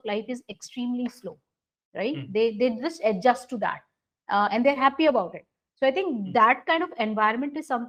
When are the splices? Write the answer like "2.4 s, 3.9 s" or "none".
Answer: none

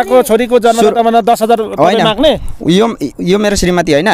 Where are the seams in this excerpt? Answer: 2.5 s

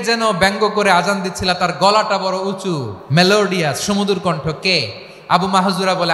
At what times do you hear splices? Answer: 2.9 s

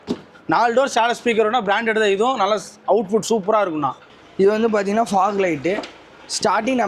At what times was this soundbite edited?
4.1 s

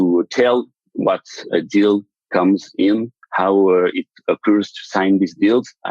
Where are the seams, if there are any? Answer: 1.5 s

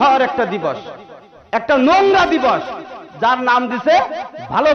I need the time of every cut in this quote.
none

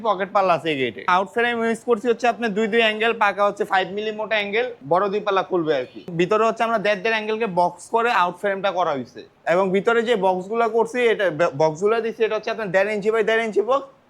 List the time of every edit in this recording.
1.1 s, 4.8 s, 6.0 s, 9.3 s

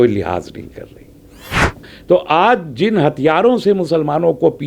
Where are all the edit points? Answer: 1.7 s

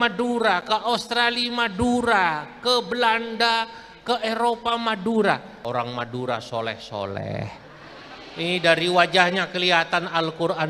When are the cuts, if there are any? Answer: 5.5 s

